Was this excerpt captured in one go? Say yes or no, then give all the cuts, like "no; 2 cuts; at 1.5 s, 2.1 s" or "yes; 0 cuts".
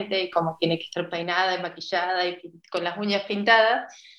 yes; 0 cuts